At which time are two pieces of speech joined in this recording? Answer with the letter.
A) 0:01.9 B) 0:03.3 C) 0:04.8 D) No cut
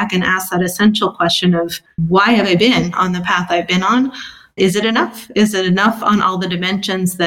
A